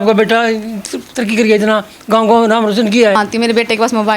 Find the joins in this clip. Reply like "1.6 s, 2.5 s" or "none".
3.2 s